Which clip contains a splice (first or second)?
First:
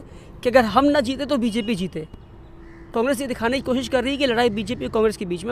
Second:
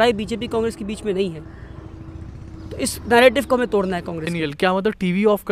second